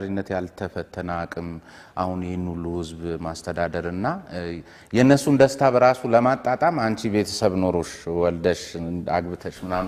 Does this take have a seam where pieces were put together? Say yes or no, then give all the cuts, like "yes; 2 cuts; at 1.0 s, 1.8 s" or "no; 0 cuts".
no; 0 cuts